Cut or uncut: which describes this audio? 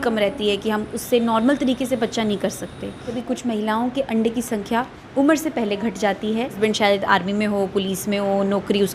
cut